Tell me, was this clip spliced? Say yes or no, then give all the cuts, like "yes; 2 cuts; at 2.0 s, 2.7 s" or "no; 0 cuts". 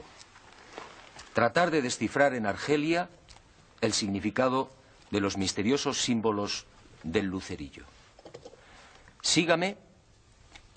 yes; 1 cut; at 7.7 s